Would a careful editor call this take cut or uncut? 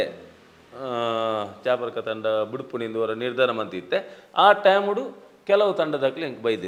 uncut